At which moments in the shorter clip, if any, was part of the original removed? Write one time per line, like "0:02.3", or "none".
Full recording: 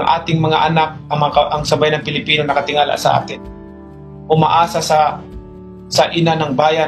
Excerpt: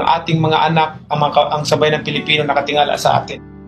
none

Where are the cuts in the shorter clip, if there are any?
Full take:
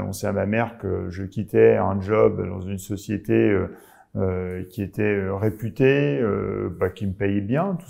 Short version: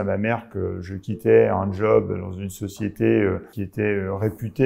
0:03.6

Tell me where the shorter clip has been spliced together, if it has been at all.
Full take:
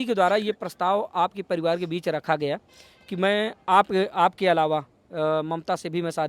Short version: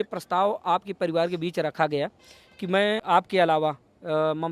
0:03.0

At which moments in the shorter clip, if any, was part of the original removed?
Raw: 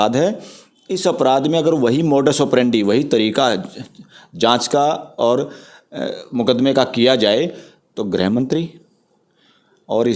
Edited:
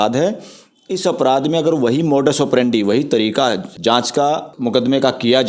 0:03.7
0:04.5

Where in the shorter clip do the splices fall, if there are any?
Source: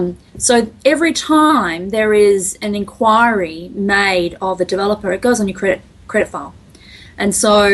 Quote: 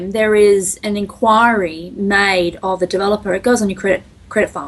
none

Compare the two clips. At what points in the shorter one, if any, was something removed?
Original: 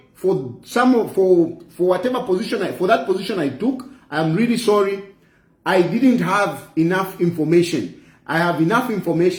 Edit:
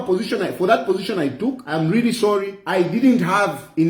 0:01.6
0:02.6

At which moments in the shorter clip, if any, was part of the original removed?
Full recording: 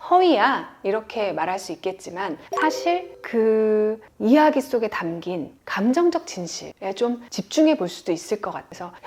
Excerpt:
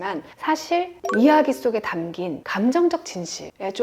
0:01.0
0:02.4

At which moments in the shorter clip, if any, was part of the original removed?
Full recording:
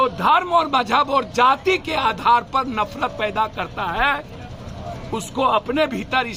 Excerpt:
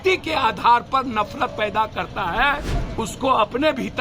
0:02.8

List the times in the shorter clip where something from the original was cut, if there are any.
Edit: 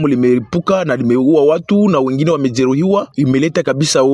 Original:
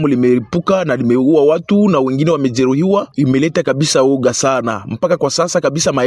none

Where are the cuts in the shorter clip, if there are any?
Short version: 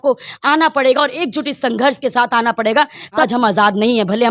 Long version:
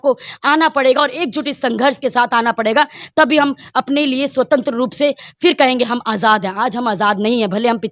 0:03.2

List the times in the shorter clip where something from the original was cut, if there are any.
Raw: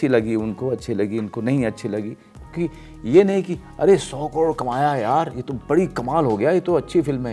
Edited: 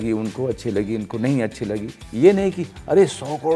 0:02.0

